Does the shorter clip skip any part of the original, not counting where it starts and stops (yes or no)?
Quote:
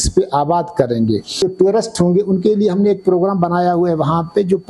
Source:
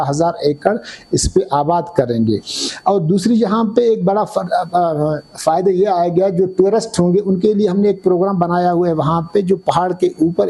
yes